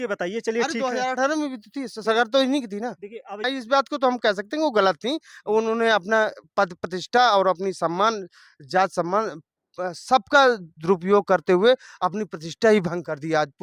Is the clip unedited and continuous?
no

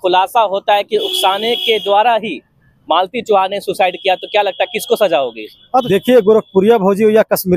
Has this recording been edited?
yes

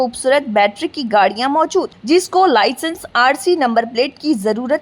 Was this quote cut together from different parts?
no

